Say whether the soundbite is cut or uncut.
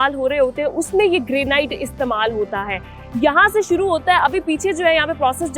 uncut